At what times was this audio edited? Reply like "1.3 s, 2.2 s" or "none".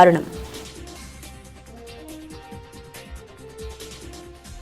0.9 s